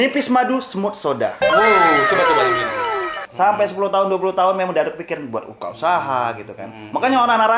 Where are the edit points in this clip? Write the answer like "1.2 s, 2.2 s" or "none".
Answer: 3.2 s